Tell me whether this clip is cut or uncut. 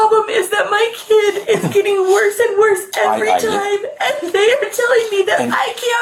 uncut